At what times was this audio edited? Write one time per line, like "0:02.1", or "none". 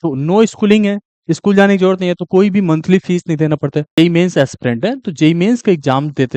0:04.0